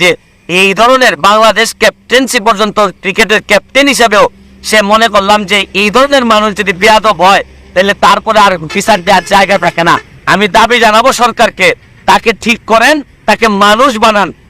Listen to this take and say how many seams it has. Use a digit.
1